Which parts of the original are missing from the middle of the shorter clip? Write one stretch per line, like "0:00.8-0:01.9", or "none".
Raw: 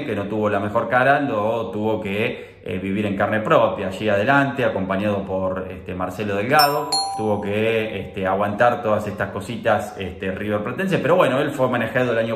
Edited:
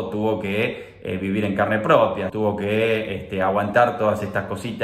0:03.9-0:07.2